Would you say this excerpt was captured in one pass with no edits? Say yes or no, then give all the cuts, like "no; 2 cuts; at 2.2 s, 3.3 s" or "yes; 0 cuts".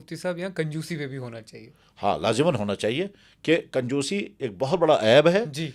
yes; 0 cuts